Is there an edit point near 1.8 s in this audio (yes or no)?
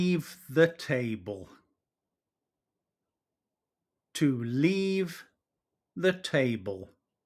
no